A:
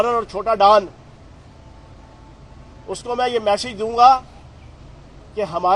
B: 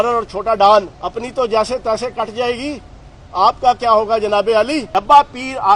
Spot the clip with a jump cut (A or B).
B